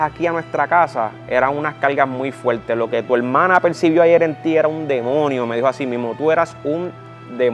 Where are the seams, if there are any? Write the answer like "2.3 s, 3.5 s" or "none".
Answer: none